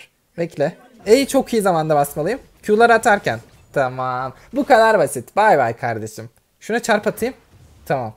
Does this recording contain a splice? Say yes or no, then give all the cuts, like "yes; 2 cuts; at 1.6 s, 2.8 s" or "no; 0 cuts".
no; 0 cuts